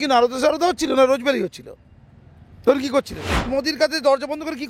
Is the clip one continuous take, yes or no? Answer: no